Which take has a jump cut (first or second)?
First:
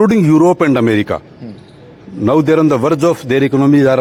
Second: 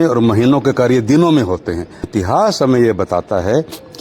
second